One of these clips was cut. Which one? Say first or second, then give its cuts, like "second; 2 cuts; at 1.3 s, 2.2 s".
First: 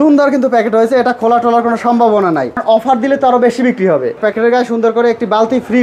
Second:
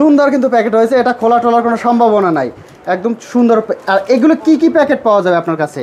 first; 2 cuts; at 2.6 s, 4.2 s